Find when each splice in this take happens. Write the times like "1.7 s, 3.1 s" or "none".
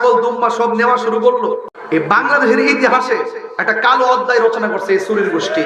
1.7 s